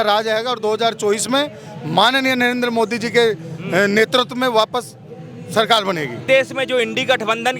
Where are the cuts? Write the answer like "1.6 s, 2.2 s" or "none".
6.2 s